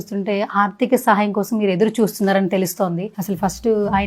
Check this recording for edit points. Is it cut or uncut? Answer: uncut